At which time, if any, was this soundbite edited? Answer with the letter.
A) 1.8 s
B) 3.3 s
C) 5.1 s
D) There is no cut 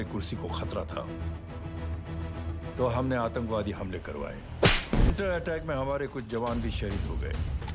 C